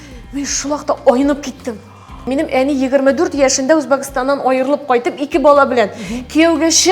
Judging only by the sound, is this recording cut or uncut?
cut